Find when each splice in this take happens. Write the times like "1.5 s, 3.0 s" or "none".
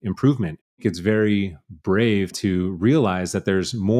0.8 s, 2.3 s